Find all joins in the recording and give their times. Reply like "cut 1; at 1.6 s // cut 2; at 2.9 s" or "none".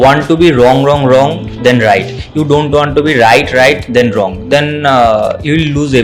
none